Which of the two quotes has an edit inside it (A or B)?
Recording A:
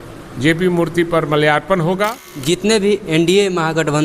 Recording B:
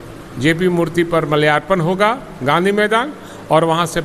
A